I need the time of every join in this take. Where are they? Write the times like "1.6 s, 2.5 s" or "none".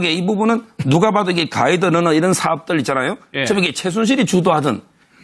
3.9 s